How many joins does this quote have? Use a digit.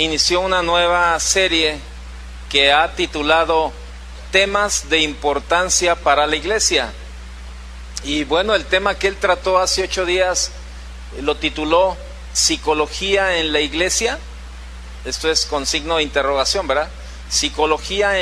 0